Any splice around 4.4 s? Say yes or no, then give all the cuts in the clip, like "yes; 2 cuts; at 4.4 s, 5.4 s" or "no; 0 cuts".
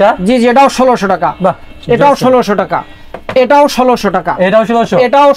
no; 0 cuts